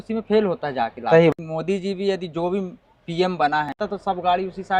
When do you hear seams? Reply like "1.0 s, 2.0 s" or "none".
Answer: 1.3 s, 3.8 s